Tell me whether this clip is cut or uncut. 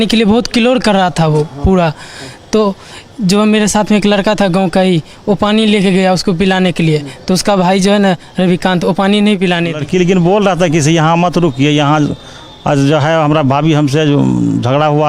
cut